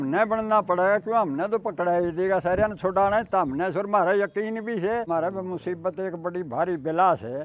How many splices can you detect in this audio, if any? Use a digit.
1